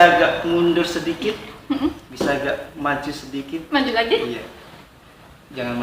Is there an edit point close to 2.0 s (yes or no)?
yes